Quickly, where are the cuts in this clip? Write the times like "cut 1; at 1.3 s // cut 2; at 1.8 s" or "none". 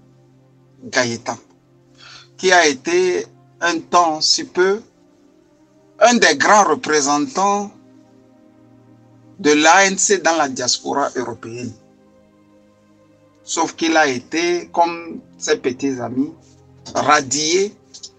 none